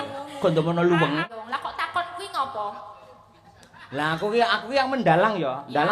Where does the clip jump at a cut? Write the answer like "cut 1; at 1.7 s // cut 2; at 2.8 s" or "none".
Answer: cut 1; at 1.3 s